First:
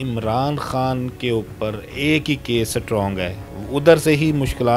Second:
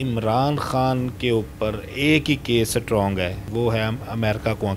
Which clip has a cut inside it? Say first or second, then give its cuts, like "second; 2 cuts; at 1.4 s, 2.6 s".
second; 1 cut; at 3.4 s